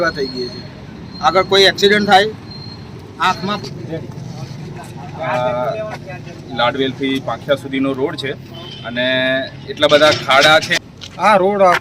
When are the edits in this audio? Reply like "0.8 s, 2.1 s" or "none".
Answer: 3.6 s, 10.7 s